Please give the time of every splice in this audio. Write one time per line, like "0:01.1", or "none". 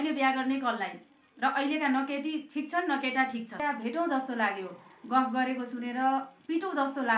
0:03.6